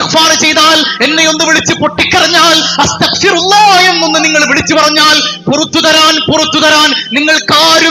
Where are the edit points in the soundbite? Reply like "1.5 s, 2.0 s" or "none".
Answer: none

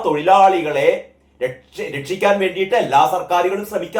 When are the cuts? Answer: none

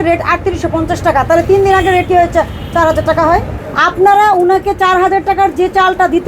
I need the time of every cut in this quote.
3.6 s

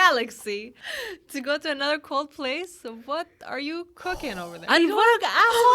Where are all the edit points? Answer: 4.5 s

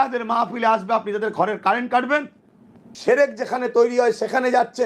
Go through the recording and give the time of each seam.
2.9 s

